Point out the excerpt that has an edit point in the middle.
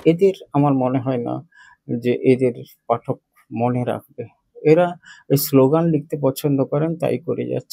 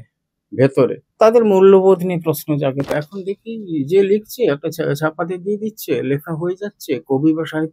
second; 2 cuts; at 1.0 s, 2.9 s

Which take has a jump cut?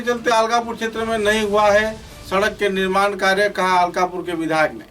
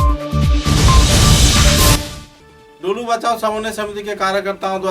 second; 1 cut; at 2.0 s

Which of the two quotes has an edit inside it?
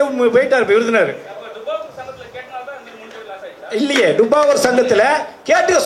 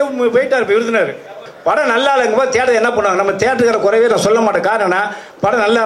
second; 1 cut; at 1.5 s

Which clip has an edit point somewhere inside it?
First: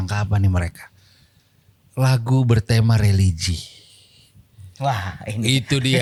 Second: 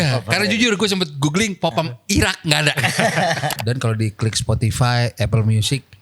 second; 1 cut; at 3.6 s

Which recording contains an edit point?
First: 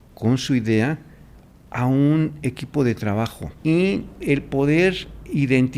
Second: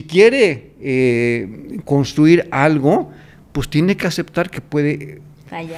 first; 1 cut; at 3.5 s

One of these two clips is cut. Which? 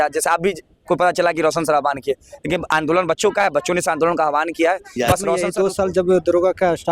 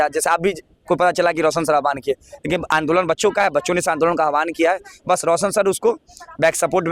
first; 1 cut; at 5.5 s

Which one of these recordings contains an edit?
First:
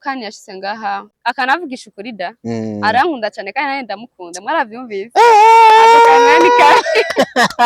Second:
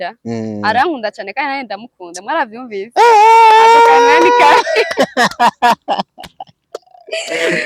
first; 1 cut; at 1.1 s

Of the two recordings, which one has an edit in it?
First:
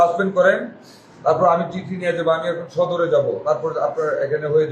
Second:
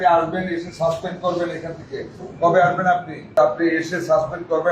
second; 1 cut; at 3.3 s

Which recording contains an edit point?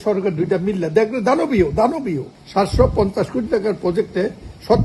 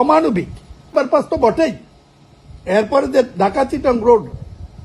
first; 1 cut; at 2.3 s

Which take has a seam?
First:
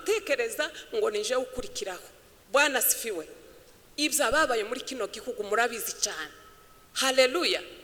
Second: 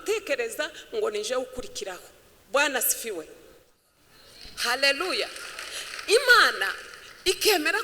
second; 1 cut; at 3.8 s

